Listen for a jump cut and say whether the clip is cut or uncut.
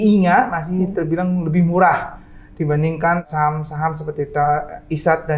cut